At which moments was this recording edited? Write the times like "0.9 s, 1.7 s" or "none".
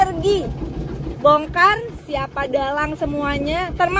1.0 s